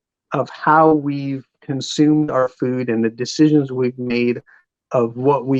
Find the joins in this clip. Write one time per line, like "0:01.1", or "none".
none